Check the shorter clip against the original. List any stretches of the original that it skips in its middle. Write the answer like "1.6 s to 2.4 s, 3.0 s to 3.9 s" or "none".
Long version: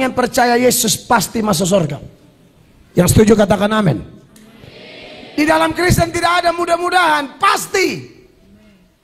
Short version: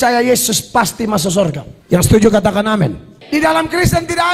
2.0 s to 2.7 s, 4.1 s to 5.1 s